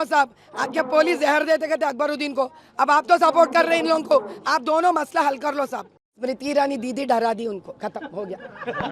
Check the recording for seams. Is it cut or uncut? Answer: cut